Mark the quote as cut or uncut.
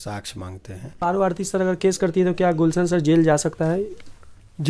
cut